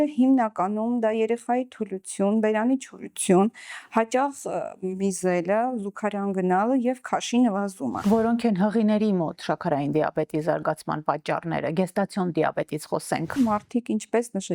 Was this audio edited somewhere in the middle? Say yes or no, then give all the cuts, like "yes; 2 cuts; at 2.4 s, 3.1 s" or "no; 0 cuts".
yes; 2 cuts; at 8.0 s, 13.3 s